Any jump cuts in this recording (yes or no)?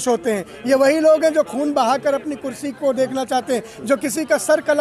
no